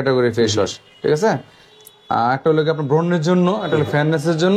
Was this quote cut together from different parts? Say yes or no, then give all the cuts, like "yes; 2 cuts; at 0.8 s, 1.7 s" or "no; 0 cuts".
no; 0 cuts